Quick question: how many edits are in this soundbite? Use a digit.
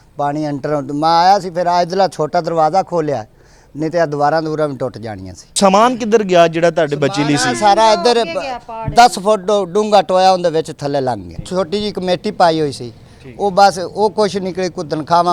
2